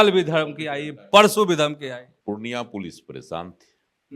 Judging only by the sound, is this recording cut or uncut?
uncut